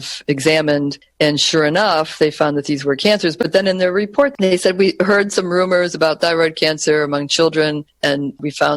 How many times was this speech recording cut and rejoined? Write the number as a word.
two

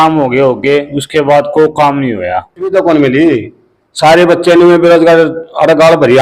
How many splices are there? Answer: one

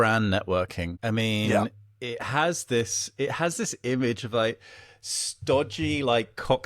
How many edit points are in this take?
one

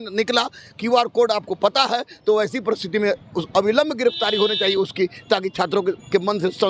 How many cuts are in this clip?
zero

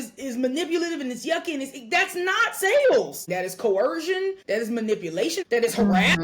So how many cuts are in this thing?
three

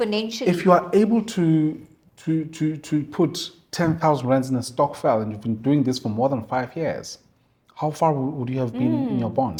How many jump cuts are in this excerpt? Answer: zero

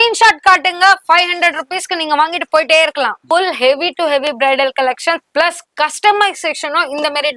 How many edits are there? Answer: one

